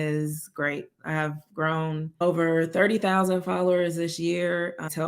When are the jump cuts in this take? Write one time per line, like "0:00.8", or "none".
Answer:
0:02.2